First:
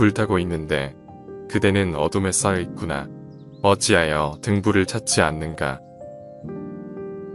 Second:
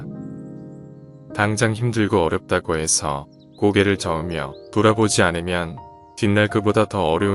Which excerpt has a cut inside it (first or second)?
first